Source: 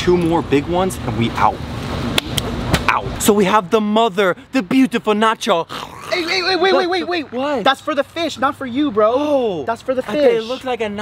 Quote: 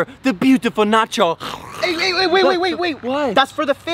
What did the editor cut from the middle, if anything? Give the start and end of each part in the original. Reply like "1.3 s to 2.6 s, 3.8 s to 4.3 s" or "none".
none

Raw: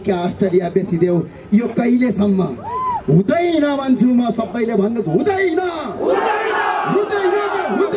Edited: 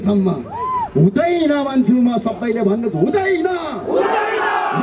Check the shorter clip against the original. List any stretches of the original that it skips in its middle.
none

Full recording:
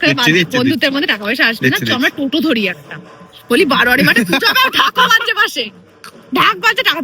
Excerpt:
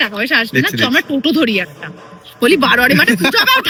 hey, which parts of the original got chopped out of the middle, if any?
none

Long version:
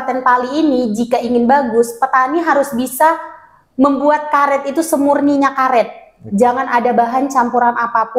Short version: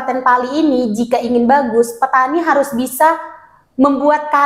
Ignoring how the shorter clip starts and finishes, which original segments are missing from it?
none

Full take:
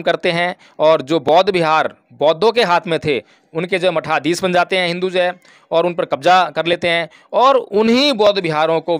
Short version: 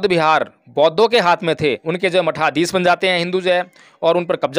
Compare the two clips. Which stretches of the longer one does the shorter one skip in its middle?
3.3 s to 3.5 s

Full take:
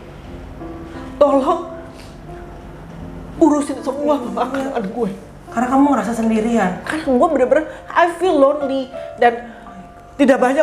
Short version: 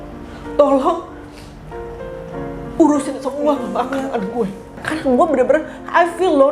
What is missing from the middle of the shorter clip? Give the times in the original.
5.4 s to 6.8 s

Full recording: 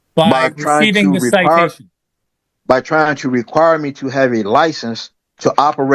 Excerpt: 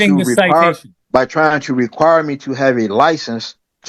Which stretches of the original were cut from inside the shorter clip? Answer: 1.9 s to 2.5 s

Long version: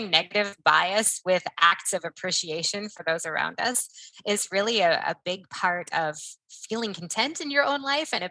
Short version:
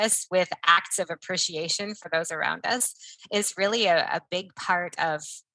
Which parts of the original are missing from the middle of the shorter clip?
none

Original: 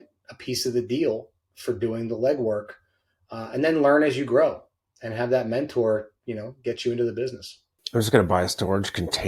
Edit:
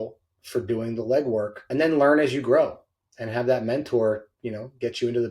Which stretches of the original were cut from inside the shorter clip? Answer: 2.7 s to 3.4 s

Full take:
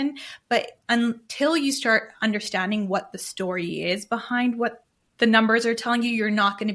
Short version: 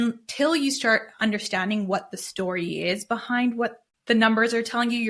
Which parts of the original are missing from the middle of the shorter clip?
4.9 s to 5.0 s

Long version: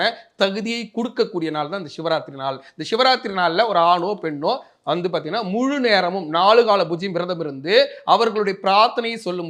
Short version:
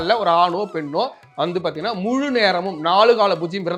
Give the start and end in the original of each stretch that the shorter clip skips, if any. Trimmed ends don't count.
none

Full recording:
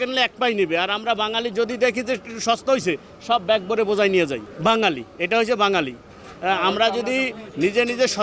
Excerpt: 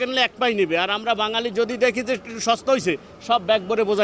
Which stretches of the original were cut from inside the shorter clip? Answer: none

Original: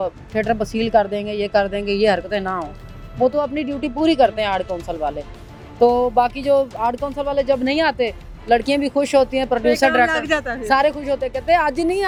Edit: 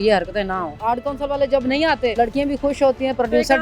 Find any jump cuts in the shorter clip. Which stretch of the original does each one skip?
2.7 s to 6.7 s, 8.1 s to 8.5 s

